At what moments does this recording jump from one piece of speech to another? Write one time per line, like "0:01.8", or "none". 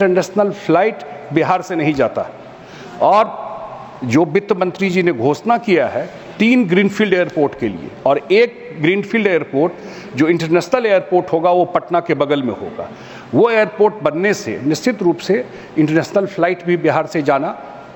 none